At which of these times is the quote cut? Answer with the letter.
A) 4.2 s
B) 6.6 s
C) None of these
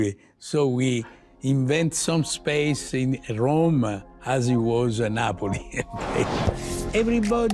B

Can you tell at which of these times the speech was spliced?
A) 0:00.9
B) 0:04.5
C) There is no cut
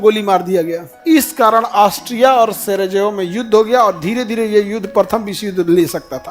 A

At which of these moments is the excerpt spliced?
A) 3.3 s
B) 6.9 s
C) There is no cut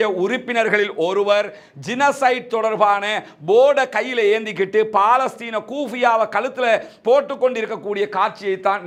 C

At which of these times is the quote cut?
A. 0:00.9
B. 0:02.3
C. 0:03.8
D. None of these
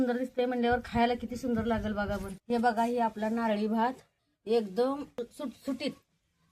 B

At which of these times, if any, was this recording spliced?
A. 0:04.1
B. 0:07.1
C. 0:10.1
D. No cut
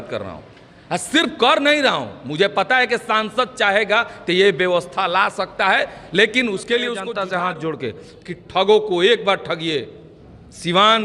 B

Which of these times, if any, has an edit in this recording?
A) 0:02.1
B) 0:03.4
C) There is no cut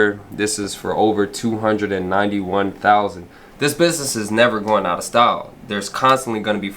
B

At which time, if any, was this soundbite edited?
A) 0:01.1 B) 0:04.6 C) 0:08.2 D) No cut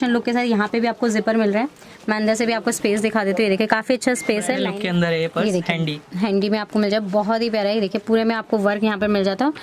B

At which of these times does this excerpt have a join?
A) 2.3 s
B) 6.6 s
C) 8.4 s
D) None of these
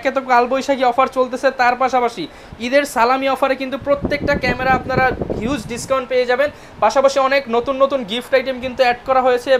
D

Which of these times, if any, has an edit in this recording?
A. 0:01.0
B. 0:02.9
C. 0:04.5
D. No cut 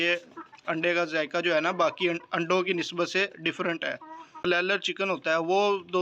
C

